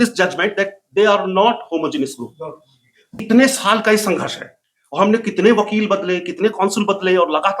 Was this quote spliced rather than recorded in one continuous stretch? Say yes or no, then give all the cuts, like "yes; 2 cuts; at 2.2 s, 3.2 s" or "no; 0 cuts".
yes; 1 cut; at 3.2 s